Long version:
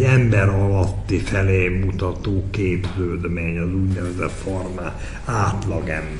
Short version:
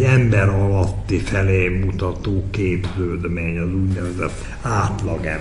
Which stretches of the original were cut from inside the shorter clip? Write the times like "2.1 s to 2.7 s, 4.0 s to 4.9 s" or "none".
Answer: 4.4 s to 5.0 s